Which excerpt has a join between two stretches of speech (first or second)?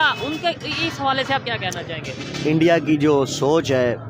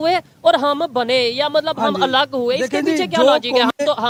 first